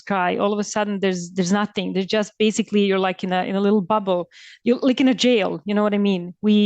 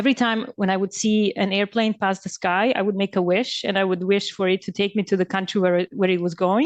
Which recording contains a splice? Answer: first; 1 cut; at 4.5 s

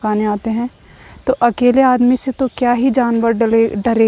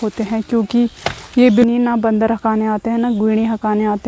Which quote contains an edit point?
second; 1 cut; at 1.6 s

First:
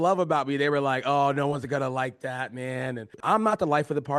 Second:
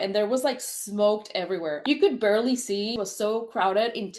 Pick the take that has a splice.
first; 1 cut; at 3.1 s

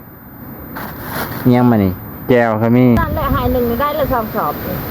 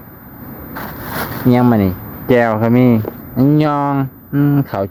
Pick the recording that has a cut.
first; 1 cut; at 3.0 s

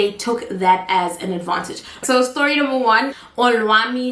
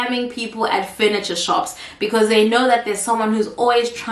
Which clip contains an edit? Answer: first; 2 cuts; at 2.0 s, 3.2 s

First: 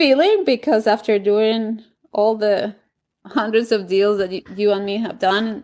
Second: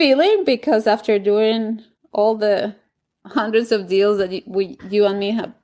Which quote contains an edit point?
first; 1 cut; at 4.5 s

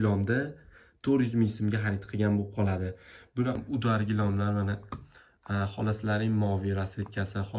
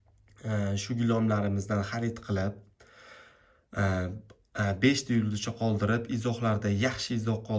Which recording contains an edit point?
first; 1 cut; at 3.6 s

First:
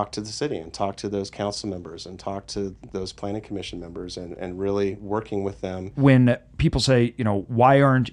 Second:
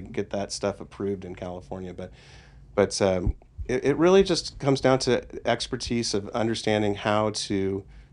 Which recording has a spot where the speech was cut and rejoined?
first; 1 cut; at 5.9 s

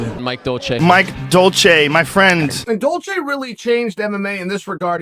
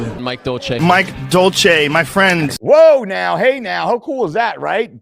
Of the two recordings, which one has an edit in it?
first; 1 cut; at 2.5 s

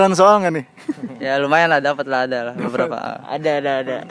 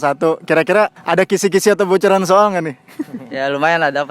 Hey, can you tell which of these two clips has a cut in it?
second; 1 cut; at 1.0 s

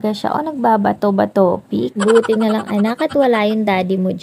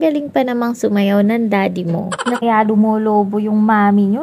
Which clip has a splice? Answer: second; 1 cut; at 2.4 s

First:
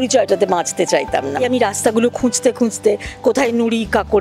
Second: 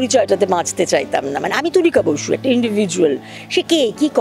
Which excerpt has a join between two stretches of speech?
first; 1 cut; at 1.4 s

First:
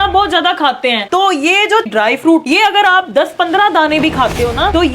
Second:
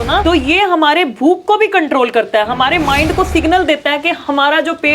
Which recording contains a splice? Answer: first; 2 cuts; at 1.1 s, 2.4 s

